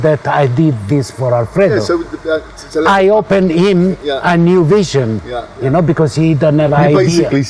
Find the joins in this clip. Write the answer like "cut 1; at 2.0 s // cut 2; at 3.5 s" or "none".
none